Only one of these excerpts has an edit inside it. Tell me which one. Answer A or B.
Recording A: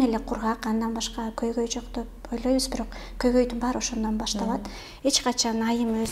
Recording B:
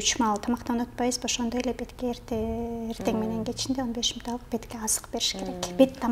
A